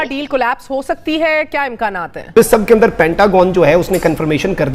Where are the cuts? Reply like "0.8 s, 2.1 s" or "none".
2.4 s